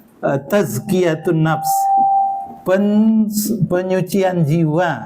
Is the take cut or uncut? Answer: cut